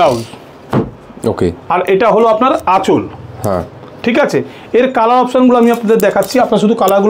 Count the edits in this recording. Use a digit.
0